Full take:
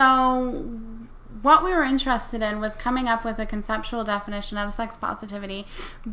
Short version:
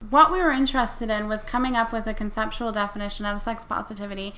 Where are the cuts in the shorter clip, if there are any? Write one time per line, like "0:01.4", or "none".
none